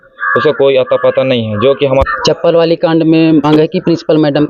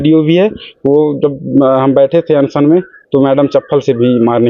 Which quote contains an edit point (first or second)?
first